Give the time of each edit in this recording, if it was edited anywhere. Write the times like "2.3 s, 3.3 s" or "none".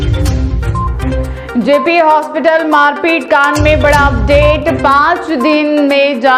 none